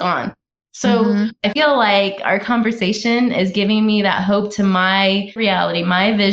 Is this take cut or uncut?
cut